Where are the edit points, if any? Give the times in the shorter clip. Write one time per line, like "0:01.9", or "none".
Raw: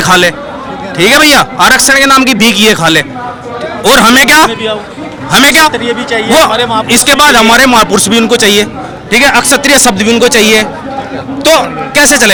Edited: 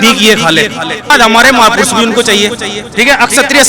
0:01.1

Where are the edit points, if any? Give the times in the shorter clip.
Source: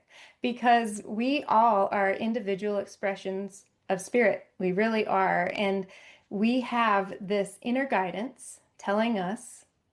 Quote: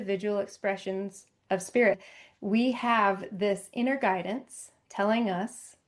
0:02.1

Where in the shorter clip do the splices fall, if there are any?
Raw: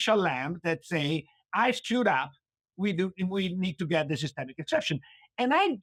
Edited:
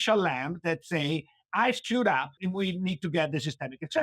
0:02.4

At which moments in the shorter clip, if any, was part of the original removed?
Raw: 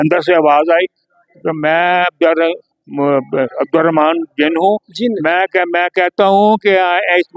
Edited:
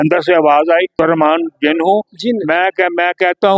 0:00.9

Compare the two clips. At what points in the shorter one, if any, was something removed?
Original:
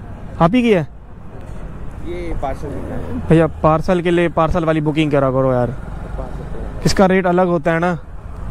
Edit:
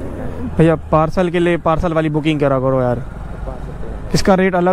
none

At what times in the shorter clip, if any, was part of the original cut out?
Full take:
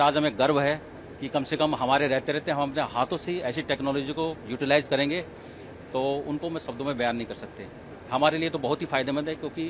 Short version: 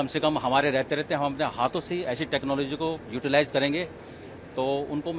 none

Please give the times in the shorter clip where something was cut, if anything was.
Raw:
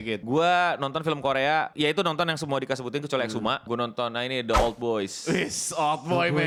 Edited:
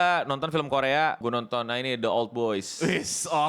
0:01.2

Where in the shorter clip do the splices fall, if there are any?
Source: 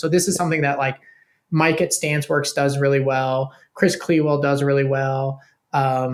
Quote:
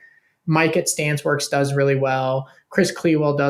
none

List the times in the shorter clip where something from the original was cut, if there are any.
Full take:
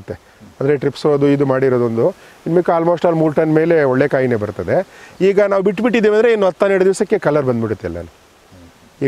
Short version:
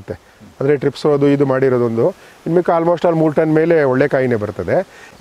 none

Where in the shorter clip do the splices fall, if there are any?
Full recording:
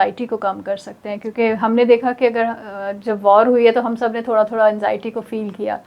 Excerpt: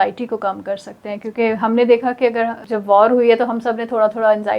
0:02.7

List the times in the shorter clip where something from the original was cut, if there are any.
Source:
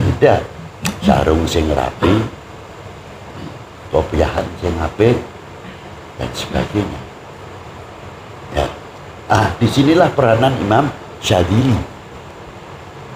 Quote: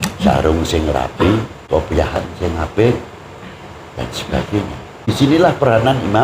0:01.5
0:05.1

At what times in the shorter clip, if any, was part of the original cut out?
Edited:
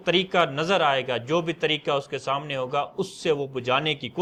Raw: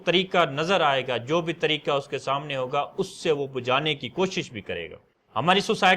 none

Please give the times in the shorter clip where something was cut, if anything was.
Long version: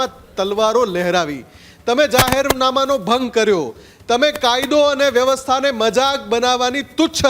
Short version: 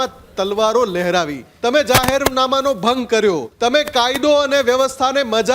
0:01.4
0:03.5

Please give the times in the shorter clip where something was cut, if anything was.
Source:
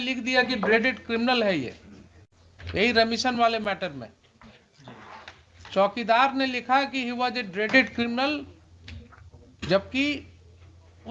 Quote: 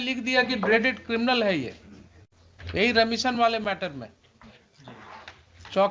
none

